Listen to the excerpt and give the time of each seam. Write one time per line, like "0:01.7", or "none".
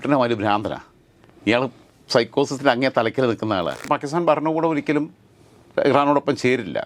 0:03.8